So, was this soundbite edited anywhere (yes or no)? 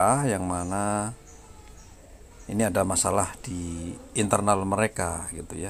no